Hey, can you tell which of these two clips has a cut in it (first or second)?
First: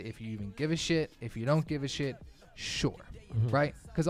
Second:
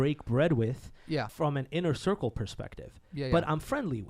second